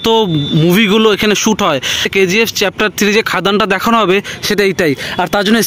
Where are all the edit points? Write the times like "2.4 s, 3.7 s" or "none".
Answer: 2.0 s